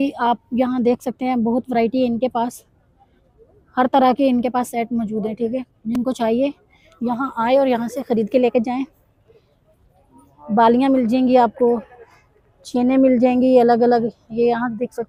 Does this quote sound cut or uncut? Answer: uncut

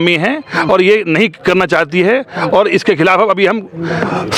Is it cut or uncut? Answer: uncut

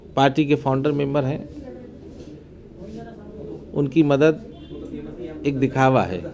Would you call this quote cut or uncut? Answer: uncut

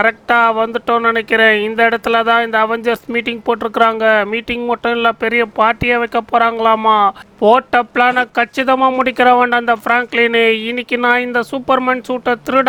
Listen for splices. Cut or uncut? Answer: uncut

